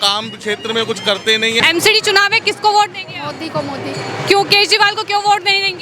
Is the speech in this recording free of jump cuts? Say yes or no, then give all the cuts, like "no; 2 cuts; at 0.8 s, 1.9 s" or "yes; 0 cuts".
no; 1 cut; at 1.6 s